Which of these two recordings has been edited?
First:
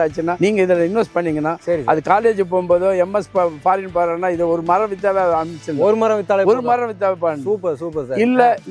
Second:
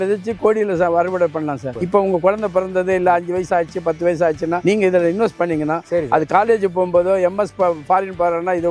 second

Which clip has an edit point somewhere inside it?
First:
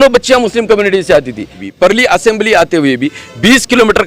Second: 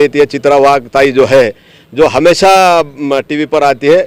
first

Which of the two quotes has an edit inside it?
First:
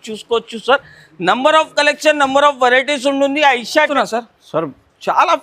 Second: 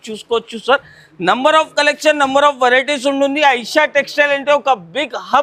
first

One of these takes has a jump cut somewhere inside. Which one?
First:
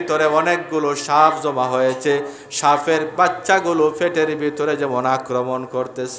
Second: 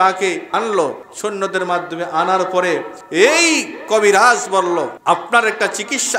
second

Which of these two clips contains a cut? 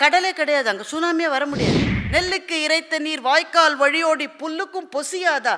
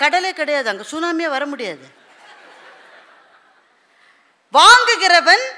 first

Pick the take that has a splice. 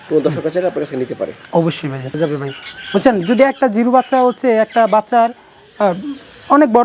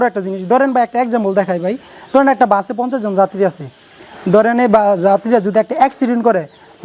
first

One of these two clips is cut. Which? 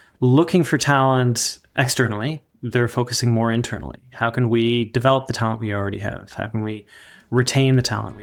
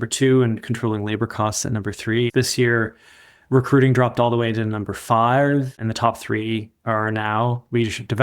second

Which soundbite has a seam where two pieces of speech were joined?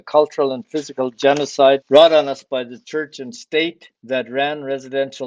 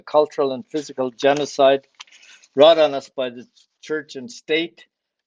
first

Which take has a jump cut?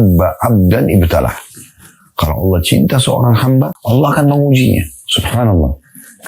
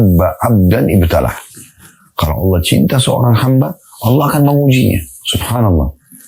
first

